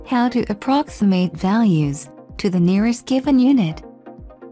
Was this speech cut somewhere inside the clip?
no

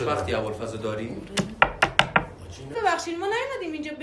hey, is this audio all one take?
no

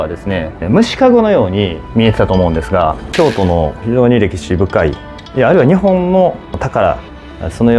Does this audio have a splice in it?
yes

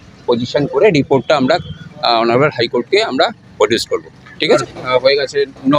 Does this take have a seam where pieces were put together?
yes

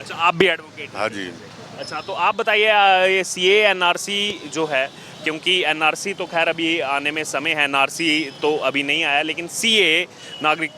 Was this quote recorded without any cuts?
yes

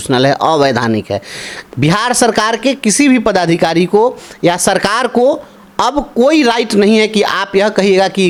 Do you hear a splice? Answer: no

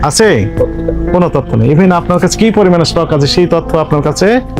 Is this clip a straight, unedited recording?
yes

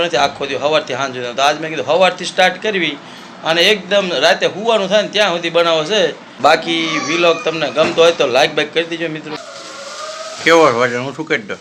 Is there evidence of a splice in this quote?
no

